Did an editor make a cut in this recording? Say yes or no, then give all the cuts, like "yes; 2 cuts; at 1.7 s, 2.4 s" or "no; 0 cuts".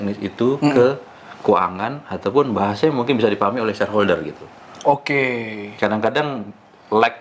no; 0 cuts